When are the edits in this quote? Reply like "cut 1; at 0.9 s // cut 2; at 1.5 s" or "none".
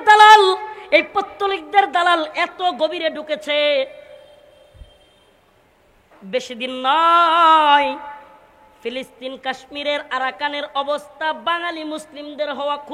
none